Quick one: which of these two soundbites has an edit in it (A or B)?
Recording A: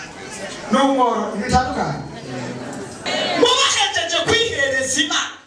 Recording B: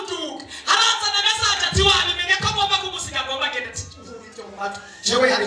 A